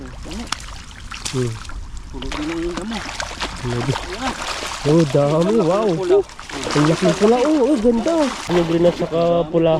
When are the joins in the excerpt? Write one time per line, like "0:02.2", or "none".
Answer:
0:08.5